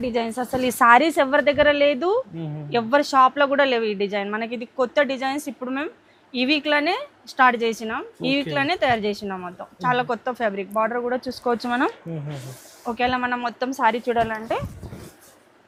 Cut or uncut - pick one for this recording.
uncut